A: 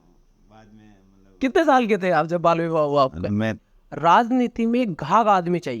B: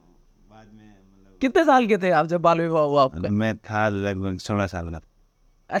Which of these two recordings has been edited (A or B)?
A